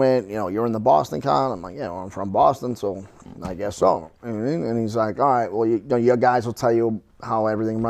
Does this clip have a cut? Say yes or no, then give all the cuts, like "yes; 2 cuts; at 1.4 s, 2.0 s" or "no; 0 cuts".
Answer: no; 0 cuts